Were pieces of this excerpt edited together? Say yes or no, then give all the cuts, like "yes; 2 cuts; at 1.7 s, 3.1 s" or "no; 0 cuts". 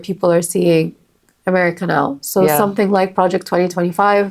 no; 0 cuts